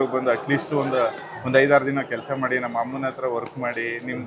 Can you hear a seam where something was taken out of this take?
no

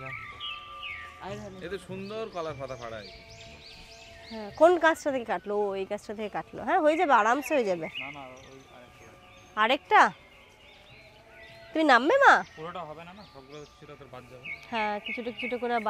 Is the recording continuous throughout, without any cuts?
yes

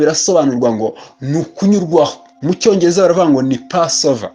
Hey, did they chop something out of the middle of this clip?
yes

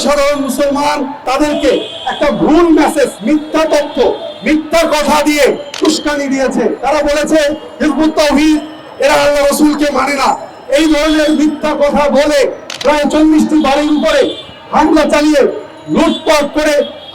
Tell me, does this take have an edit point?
yes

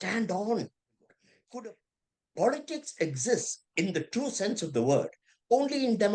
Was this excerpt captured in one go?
no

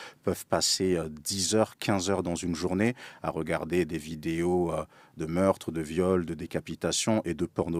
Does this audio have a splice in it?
no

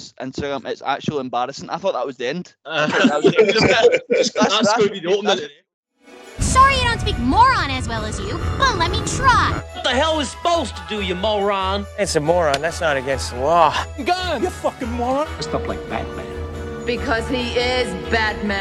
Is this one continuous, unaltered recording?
no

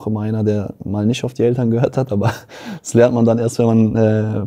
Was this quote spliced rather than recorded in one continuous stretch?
no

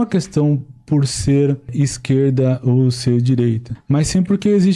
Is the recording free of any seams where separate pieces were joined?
no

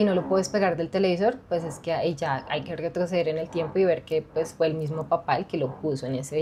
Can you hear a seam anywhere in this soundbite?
no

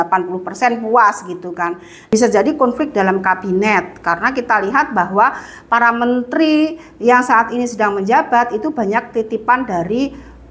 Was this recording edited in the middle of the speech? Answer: yes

